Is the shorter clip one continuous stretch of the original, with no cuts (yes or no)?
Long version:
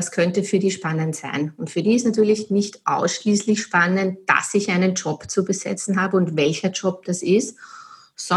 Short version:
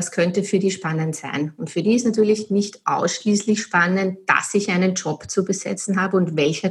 yes